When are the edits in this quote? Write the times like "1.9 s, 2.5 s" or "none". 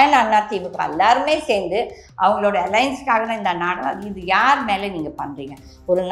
none